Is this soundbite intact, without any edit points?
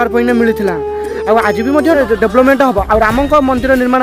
no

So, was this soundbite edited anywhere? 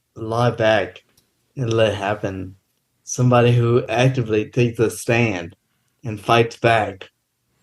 yes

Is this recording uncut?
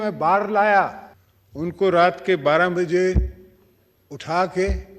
no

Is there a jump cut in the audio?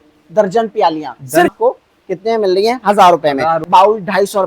yes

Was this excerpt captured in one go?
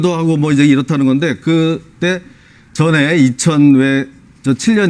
yes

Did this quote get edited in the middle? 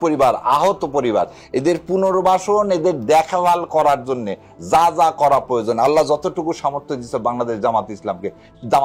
no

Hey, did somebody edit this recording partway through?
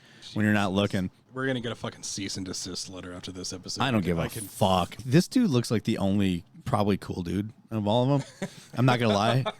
yes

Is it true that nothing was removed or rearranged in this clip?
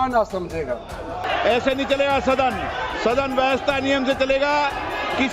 no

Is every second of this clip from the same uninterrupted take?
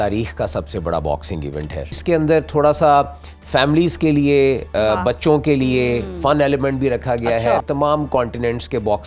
no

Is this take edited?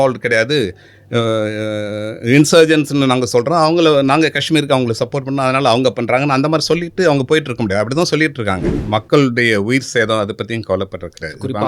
yes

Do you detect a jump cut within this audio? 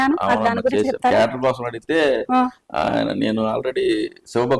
no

